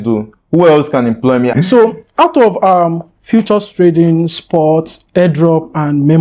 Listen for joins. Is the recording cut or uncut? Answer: cut